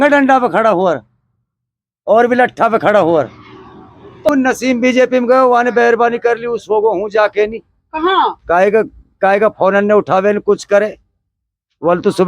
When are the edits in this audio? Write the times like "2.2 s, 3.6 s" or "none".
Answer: 4.3 s